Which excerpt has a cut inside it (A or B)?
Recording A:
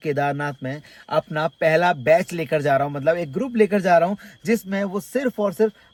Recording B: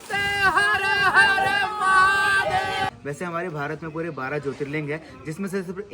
B